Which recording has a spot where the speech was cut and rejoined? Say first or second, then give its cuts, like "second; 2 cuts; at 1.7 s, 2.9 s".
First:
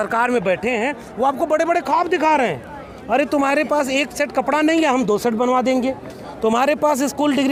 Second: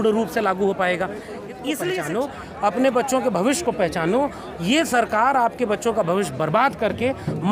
second; 1 cut; at 1.8 s